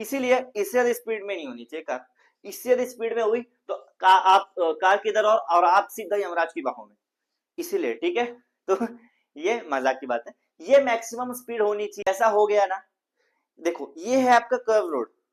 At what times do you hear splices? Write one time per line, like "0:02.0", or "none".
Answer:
0:12.1